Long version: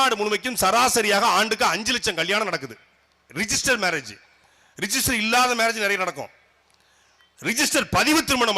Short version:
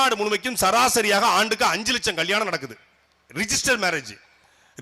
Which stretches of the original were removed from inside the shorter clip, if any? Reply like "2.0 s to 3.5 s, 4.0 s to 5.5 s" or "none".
none